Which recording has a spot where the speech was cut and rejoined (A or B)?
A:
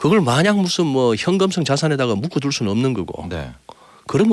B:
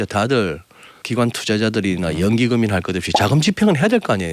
B